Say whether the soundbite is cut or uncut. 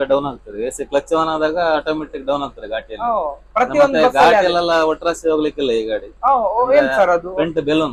uncut